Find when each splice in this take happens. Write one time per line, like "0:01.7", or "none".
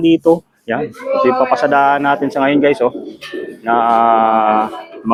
none